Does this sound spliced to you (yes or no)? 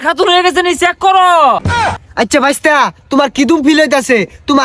yes